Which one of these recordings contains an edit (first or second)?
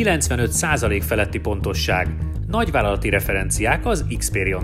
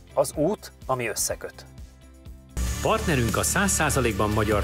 second